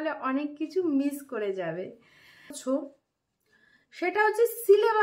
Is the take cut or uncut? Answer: cut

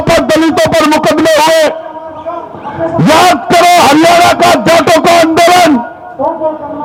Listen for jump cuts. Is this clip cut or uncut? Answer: uncut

